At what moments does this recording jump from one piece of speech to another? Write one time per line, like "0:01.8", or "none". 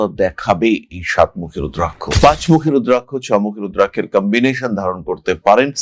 0:02.0